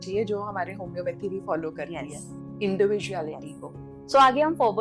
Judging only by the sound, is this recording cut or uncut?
uncut